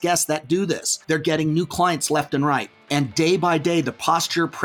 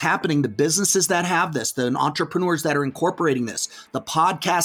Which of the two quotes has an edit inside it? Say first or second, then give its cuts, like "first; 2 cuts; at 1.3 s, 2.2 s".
first; 2 cuts; at 0.9 s, 2.8 s